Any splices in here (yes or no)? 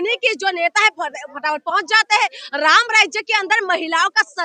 no